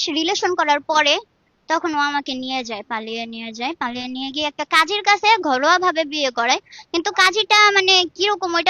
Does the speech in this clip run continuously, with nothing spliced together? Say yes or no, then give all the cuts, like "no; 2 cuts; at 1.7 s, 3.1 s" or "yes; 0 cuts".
yes; 0 cuts